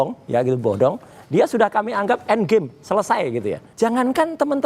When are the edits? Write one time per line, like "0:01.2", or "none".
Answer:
0:03.6